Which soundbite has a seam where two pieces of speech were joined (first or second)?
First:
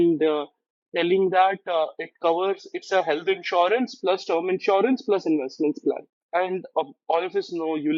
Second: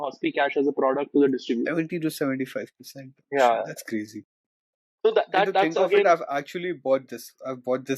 first